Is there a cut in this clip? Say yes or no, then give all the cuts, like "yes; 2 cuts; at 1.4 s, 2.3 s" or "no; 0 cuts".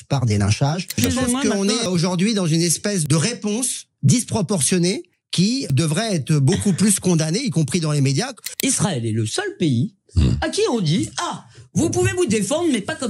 yes; 5 cuts; at 1.0 s, 1.9 s, 3.0 s, 5.6 s, 8.4 s